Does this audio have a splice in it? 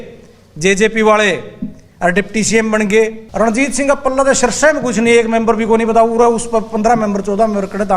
yes; 1 cut; at 3.2 s

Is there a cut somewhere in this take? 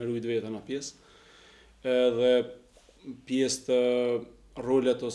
no; 0 cuts

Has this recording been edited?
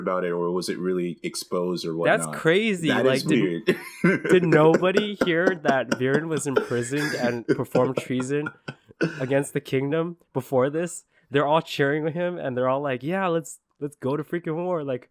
no; 0 cuts

